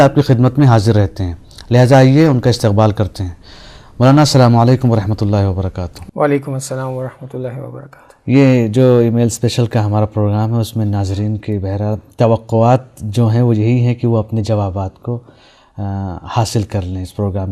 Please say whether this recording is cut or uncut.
cut